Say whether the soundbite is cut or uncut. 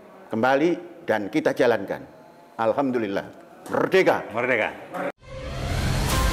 cut